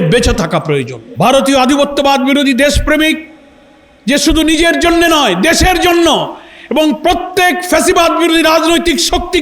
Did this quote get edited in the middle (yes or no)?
yes